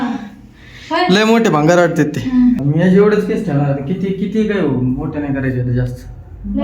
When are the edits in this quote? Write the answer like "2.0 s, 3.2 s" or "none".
2.6 s